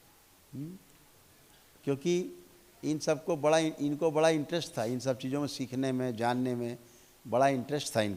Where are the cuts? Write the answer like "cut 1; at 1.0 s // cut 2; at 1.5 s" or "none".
none